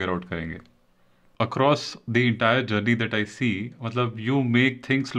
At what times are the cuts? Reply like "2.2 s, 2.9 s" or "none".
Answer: 1.2 s